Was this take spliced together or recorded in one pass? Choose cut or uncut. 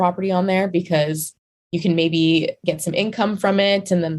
cut